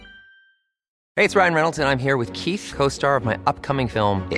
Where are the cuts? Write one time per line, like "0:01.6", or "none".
0:01.0